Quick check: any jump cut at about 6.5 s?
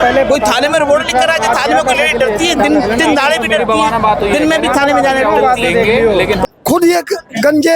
yes; 1 cut; at 6.5 s

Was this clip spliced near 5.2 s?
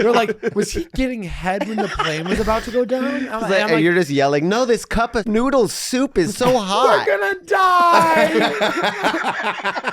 yes; 1 cut; at 5.2 s

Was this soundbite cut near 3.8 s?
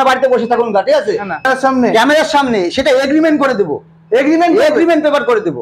no; 1 cut; at 1.5 s

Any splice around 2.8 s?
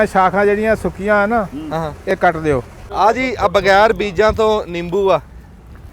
yes; 1 cut; at 2.8 s

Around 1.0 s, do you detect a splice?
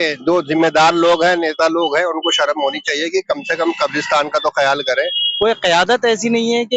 no; 1 cut; at 5.2 s

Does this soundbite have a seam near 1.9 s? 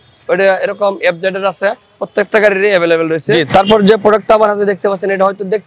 yes; 2 cuts; at 1.9 s, 3.3 s

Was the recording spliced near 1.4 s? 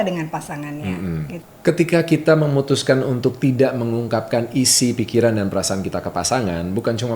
yes; 1 cut; at 1.4 s

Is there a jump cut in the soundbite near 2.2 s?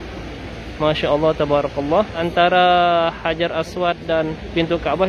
yes; 1 cut; at 2.2 s

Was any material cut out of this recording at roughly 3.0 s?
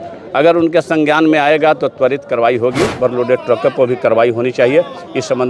yes; 1 cut; at 3.0 s

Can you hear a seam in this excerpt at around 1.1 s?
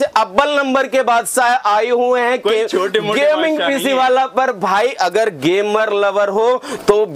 no; 0 cuts

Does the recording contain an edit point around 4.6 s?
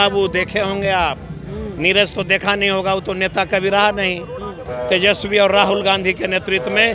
yes; 1 cut; at 4.6 s

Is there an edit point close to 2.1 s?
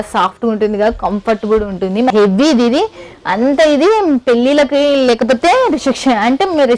yes; 1 cut; at 2.1 s

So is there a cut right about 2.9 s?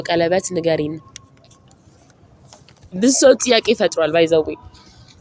yes; 1 cut; at 2.9 s

